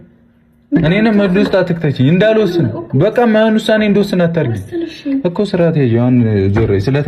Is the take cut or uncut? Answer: uncut